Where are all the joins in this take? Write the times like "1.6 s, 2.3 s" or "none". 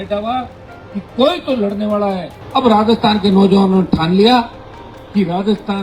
2.3 s